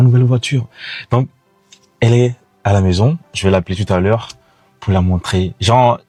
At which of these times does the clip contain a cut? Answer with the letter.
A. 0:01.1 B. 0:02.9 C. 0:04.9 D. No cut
D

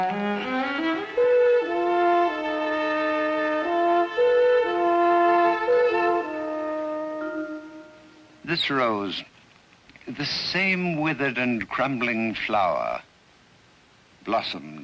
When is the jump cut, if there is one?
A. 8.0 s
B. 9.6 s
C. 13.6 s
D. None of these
C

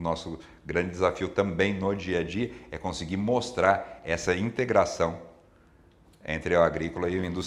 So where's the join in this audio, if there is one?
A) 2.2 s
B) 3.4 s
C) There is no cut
C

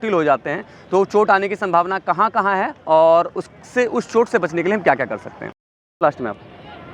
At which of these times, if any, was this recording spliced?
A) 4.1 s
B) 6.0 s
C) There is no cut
B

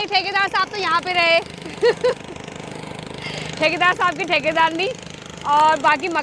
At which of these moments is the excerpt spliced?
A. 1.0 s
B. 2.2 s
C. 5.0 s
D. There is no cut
D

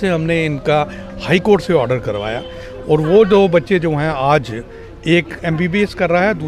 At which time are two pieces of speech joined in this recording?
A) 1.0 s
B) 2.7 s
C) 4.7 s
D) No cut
D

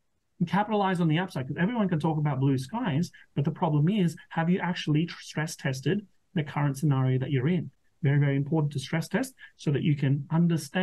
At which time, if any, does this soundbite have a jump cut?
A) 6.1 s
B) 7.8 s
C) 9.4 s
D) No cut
D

